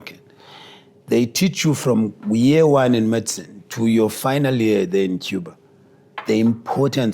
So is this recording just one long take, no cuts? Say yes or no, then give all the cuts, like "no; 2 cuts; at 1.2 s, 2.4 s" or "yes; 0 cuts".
no; 1 cut; at 2.2 s